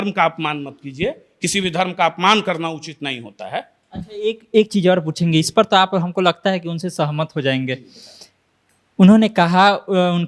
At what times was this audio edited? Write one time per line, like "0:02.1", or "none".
none